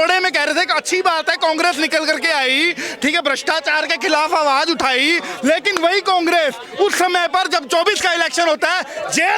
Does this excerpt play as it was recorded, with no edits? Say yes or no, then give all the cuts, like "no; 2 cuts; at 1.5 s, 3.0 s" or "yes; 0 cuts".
yes; 0 cuts